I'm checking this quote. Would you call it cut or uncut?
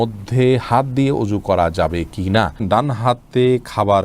cut